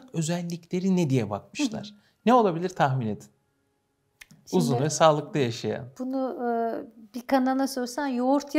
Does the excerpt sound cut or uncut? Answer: uncut